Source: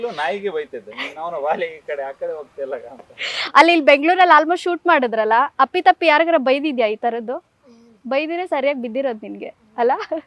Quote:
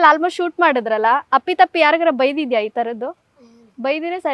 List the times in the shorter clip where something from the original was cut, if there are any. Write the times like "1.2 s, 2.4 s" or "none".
none